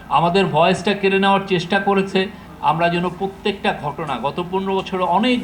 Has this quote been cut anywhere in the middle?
yes; 1 cut; at 2.5 s

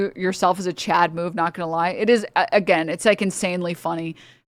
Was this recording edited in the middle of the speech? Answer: no; 0 cuts

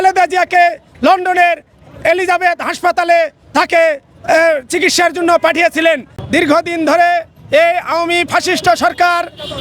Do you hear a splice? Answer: yes; 1 cut; at 6.1 s

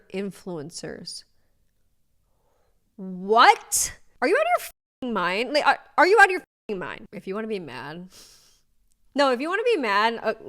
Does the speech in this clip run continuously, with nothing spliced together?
no; 1 cut; at 7.0 s

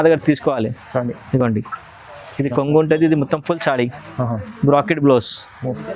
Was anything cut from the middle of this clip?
no; 0 cuts

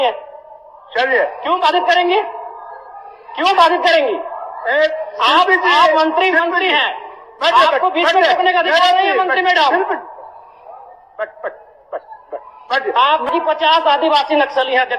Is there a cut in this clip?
yes; 1 cut; at 13.3 s

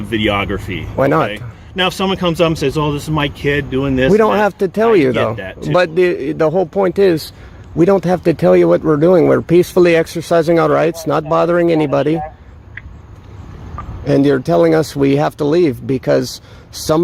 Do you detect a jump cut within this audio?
no; 0 cuts

